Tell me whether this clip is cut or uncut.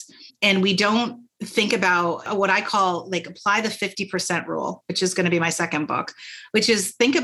cut